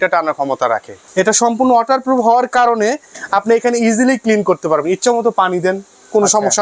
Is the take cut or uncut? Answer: cut